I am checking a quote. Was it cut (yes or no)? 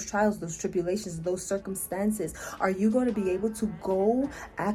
no